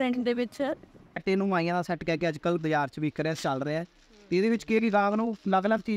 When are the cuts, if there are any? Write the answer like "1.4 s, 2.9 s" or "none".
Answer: 1.2 s